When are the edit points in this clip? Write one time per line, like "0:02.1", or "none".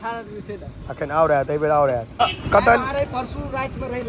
0:02.1

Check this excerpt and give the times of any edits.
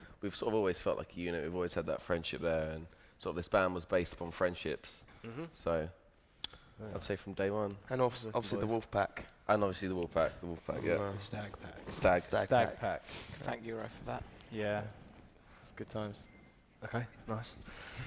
0:03.9

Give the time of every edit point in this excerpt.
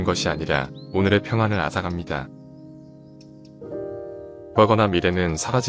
0:02.2
0:04.5

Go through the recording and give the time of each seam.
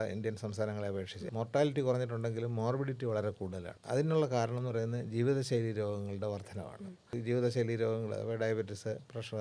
0:01.2
0:03.7
0:07.2

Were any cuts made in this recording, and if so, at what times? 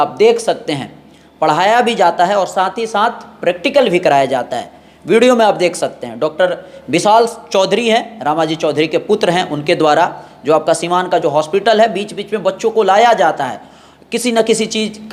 none

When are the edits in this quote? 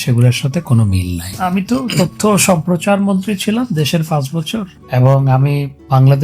0:01.3

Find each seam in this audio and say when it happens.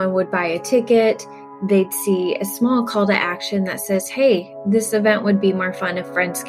none

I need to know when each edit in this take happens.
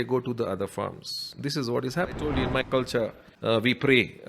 0:02.3
0:03.3

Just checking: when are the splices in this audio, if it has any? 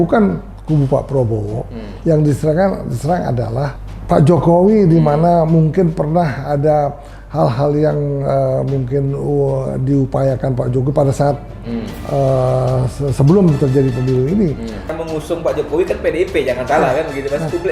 0:15.0

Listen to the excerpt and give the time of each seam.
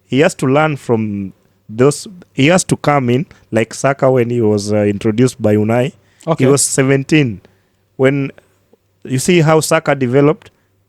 none

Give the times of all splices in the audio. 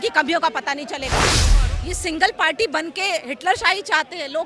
0:01.4

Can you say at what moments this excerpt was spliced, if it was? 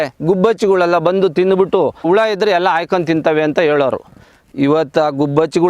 0:02.1

